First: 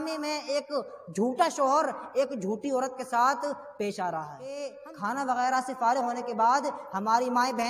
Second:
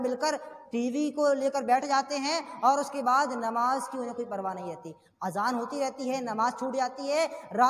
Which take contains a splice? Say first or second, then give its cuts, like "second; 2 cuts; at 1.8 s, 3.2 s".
first; 1 cut; at 4.7 s